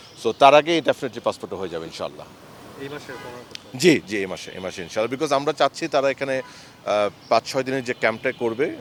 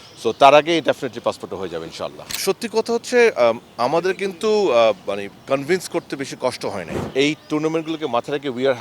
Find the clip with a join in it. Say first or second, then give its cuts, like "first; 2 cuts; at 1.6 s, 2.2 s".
second; 2 cuts; at 2.3 s, 6.9 s